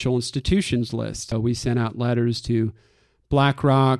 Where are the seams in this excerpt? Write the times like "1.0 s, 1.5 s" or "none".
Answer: 1.3 s